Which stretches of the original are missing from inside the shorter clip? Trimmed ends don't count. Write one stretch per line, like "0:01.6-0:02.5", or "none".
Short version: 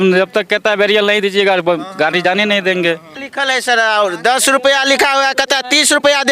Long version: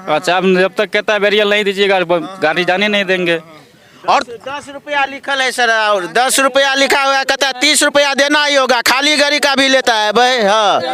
0:03.7-0:05.2